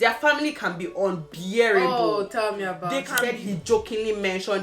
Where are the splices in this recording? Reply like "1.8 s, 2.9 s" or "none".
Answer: 3.1 s